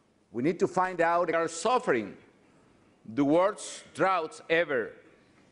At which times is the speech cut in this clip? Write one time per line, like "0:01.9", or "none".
none